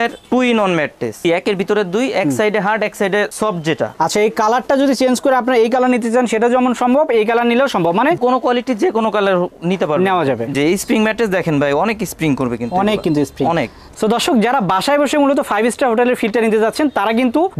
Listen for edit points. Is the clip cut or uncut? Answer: cut